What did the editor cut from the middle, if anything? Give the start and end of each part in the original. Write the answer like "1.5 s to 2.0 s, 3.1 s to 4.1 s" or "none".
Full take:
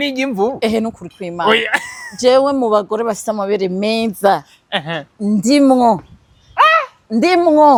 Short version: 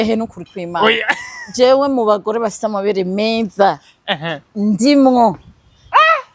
none